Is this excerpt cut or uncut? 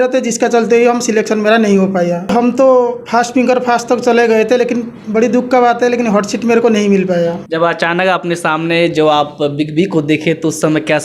cut